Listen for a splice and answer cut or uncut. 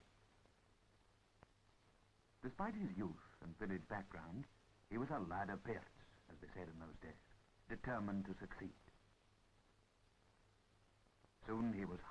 uncut